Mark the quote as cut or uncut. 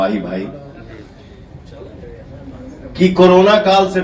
uncut